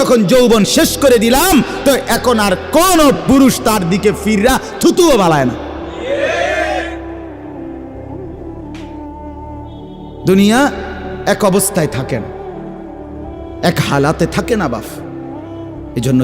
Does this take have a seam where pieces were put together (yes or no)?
yes